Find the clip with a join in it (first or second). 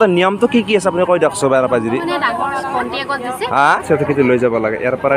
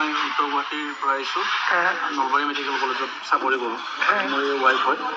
first